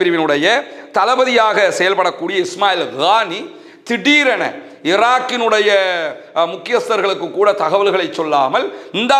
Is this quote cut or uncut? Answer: uncut